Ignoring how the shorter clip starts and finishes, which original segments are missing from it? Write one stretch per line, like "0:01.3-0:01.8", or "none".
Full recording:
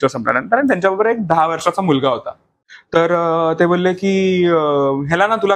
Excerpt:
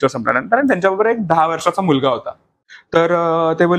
none